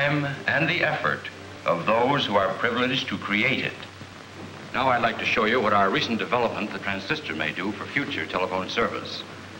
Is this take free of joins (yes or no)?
no